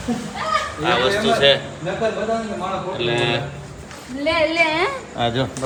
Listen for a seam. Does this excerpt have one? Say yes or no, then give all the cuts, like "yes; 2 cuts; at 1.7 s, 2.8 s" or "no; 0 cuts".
no; 0 cuts